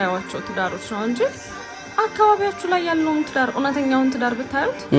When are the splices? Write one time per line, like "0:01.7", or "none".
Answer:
none